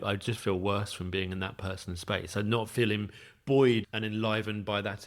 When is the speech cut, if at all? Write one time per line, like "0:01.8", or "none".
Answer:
0:03.8